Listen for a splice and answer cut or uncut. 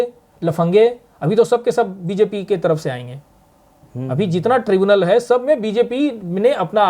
uncut